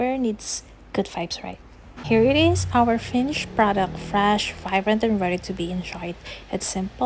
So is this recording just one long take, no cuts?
no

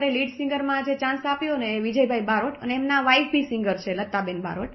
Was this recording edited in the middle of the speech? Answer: no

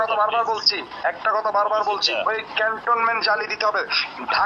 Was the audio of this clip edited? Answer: no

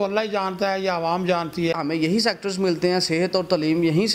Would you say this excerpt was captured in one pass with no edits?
no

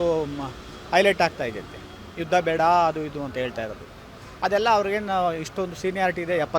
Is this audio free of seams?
yes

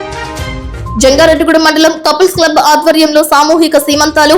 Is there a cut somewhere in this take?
yes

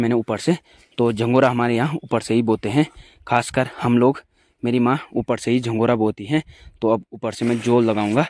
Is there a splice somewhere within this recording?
no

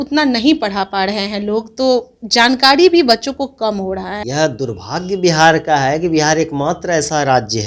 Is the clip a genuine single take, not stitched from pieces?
no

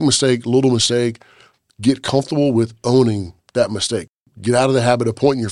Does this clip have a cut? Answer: yes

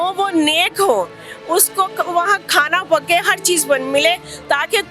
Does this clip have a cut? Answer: no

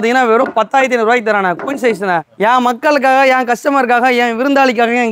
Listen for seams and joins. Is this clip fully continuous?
yes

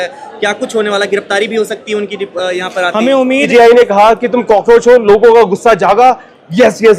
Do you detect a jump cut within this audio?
yes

